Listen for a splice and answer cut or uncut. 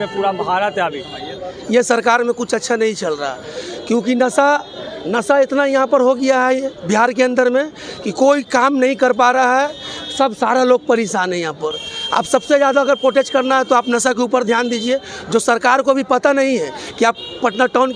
cut